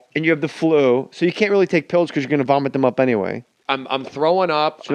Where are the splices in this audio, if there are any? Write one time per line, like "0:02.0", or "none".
none